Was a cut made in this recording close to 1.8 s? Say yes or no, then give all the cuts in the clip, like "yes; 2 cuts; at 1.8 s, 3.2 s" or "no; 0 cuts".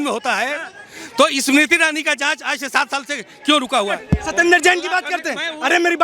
no; 1 cut; at 4.0 s